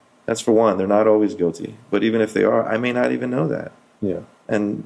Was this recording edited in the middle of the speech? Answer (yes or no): no